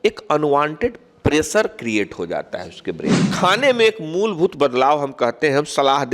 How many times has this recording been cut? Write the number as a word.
one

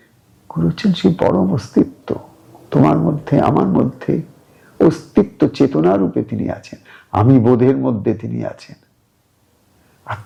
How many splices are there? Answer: zero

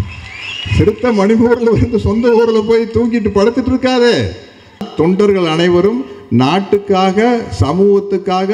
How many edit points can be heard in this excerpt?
one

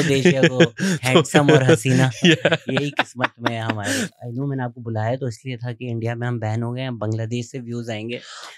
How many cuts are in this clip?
one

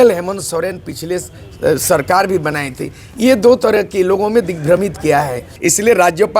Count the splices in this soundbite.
one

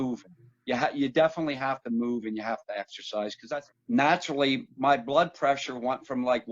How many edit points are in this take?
one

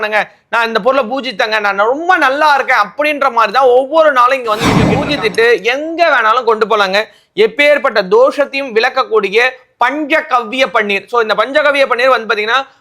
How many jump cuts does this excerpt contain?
one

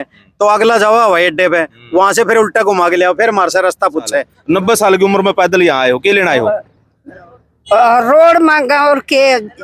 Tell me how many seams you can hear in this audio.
one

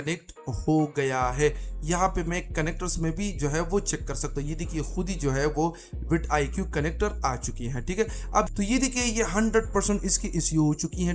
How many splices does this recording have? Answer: one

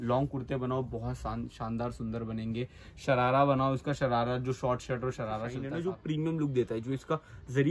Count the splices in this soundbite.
one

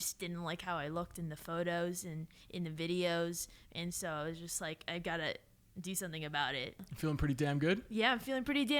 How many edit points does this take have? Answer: one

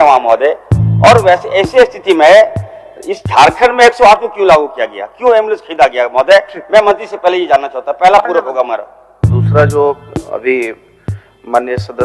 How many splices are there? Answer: one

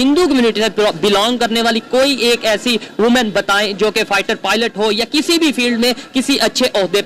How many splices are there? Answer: zero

